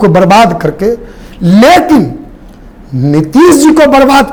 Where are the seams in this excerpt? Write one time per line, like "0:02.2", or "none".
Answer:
none